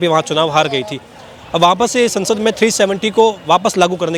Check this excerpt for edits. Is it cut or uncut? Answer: uncut